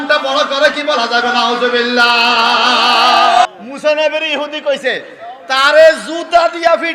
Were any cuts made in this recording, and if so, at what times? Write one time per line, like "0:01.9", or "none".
0:03.4